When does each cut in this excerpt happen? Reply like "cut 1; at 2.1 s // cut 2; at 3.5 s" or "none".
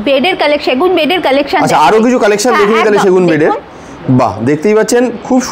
none